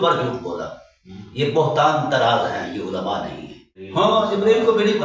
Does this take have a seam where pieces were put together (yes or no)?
yes